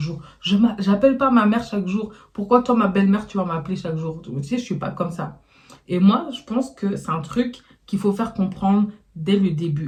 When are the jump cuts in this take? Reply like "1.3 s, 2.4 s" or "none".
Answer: none